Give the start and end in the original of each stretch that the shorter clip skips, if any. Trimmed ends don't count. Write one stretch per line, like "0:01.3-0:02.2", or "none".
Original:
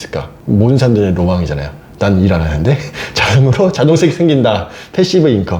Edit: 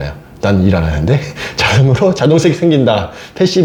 none

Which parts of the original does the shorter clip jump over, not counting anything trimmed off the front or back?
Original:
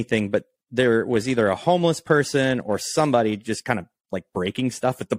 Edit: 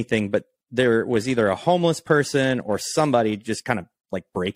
none

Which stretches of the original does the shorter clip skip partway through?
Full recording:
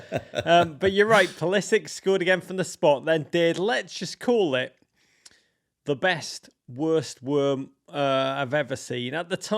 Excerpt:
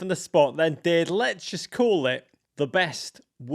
0:04.8-0:05.6

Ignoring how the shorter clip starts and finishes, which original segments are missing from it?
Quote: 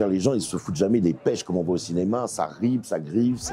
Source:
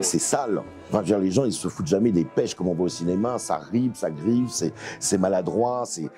none

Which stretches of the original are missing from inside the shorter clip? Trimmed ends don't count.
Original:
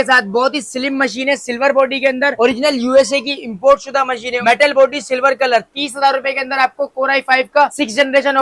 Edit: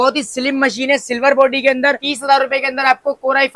0:02.3-0:05.7

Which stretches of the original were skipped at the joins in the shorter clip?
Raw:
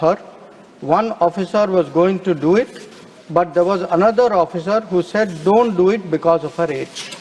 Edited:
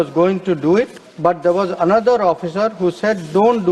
0:02.8-0:03.1

